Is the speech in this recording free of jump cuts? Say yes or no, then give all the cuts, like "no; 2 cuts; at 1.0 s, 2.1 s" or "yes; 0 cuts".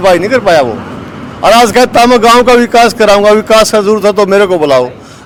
yes; 0 cuts